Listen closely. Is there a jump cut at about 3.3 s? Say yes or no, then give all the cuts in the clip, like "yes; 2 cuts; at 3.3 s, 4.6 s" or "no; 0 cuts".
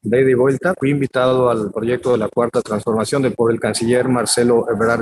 yes; 2 cuts; at 0.8 s, 3.3 s